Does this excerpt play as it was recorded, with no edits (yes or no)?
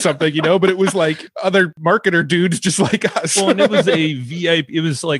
no